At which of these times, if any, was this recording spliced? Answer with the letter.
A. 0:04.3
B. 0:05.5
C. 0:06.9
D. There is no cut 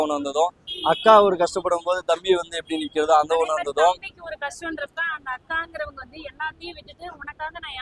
D